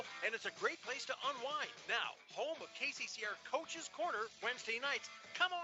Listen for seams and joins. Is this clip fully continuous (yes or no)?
yes